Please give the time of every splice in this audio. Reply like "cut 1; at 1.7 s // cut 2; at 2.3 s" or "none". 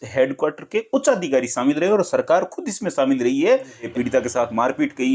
cut 1; at 3.9 s